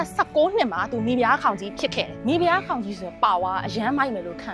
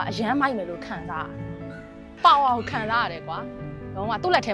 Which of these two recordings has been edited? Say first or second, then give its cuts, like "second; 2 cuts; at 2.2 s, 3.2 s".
first; 1 cut; at 2.1 s